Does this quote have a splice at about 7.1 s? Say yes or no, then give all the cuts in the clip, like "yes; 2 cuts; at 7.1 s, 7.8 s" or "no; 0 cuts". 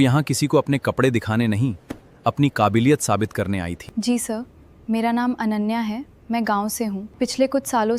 yes; 2 cuts; at 3.8 s, 7.1 s